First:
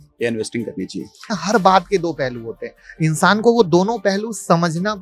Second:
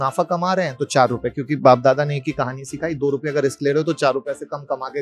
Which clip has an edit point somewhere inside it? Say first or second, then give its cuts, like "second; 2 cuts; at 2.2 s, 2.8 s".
first; 1 cut; at 1.4 s